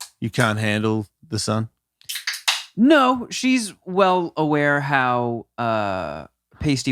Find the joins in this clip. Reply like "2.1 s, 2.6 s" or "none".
none